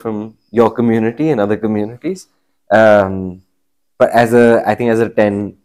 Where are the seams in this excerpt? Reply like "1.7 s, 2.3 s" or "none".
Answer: none